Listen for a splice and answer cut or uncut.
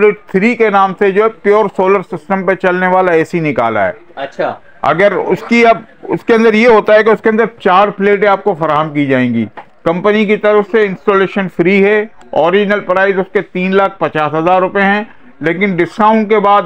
uncut